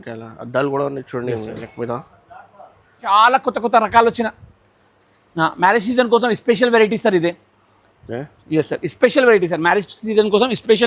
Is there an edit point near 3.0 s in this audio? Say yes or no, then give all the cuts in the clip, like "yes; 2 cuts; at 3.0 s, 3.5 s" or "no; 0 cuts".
yes; 1 cut; at 3.0 s